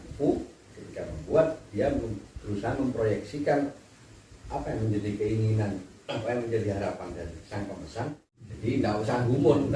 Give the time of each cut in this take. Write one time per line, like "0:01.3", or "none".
0:08.4